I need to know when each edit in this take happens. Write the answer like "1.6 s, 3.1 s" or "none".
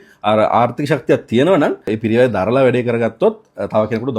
1.9 s